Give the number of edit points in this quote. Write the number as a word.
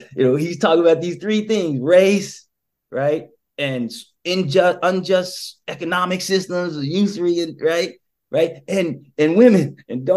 zero